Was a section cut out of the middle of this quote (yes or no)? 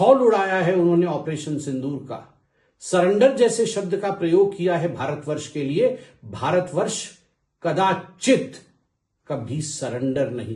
no